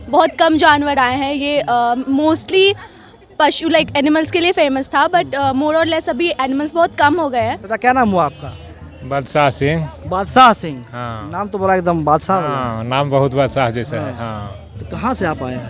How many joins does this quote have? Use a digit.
0